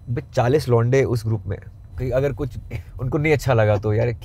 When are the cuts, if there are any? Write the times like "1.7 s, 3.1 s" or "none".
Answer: 2.0 s